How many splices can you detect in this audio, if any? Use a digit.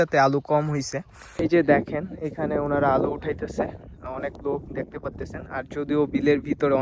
1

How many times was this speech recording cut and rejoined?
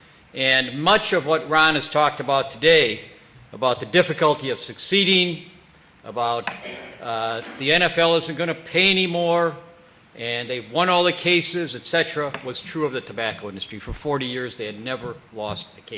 0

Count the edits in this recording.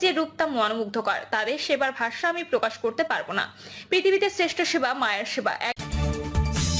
1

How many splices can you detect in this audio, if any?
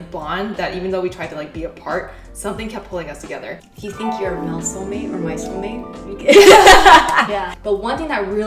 2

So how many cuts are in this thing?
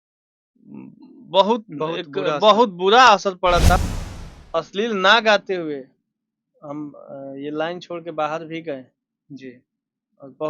1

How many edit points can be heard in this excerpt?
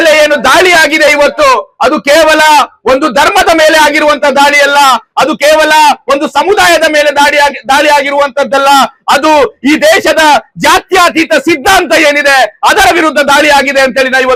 0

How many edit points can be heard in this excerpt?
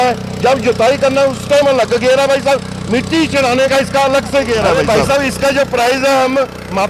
1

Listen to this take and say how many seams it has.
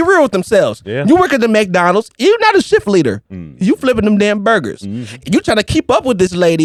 0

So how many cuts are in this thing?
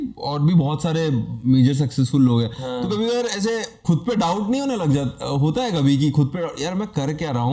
1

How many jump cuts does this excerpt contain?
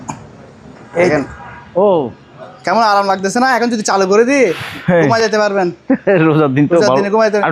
0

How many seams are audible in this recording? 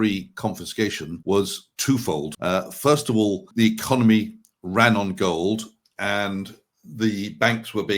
3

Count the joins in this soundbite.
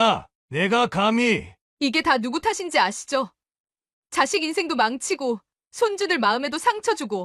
0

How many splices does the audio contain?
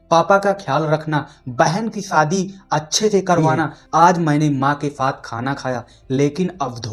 1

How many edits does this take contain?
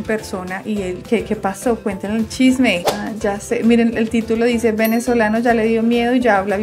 1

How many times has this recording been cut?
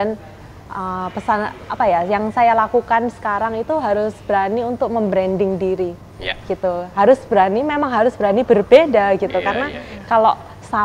0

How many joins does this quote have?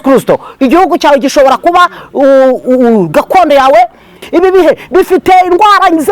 1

